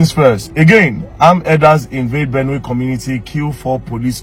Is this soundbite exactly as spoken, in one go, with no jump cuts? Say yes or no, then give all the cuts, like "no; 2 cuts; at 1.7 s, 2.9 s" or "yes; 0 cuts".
yes; 0 cuts